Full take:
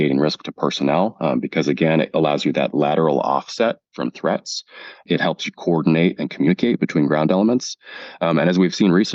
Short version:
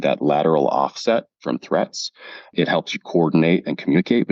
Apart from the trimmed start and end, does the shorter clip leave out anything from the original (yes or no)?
no